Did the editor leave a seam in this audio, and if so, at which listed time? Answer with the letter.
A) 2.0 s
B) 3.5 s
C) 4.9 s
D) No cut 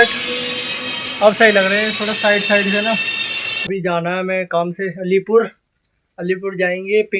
B